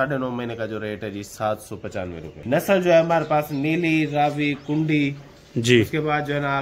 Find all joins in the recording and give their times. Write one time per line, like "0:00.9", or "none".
0:02.4